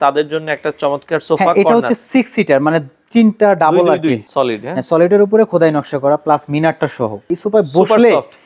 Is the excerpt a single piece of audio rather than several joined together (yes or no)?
no